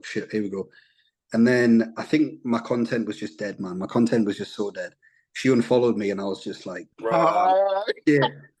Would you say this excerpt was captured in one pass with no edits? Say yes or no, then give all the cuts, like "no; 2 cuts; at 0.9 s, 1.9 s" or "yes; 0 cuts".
yes; 0 cuts